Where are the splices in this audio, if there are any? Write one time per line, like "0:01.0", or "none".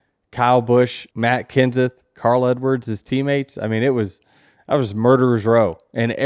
0:01.0